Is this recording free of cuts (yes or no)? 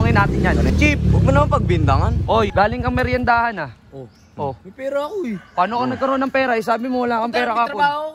no